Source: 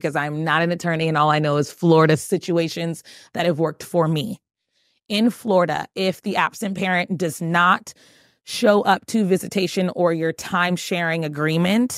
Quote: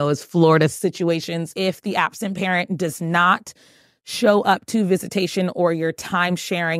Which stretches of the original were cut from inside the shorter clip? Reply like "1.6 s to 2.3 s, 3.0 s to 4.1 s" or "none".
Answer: 3.0 s to 5.9 s